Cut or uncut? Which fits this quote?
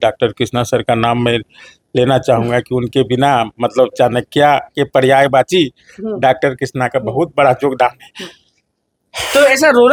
uncut